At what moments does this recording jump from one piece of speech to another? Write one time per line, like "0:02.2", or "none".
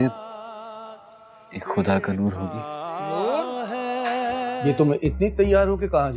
0:04.6